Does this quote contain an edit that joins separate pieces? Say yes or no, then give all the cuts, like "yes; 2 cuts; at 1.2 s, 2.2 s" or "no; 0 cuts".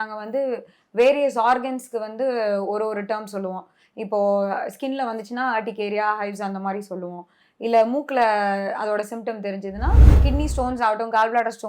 yes; 1 cut; at 10.2 s